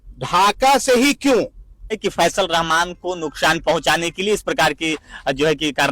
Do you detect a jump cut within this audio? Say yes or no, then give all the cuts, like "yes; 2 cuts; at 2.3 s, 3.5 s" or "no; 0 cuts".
yes; 1 cut; at 2.0 s